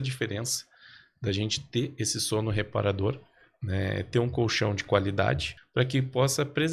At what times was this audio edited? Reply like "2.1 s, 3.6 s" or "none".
5.5 s